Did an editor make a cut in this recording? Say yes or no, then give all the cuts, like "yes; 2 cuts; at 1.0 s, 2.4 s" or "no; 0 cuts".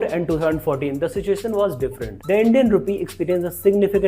yes; 1 cut; at 2.1 s